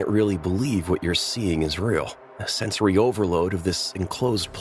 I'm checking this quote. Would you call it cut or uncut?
uncut